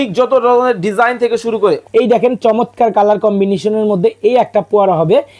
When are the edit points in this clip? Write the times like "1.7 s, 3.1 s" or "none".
1.8 s

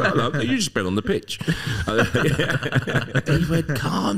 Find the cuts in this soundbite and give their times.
3.2 s

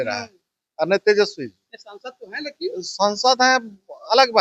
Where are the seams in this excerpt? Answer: none

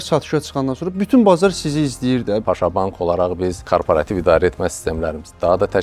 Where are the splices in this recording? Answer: 2.4 s, 3.6 s

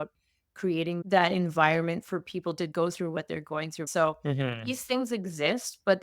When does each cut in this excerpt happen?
3.8 s

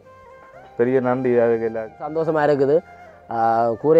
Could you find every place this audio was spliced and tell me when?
2.1 s

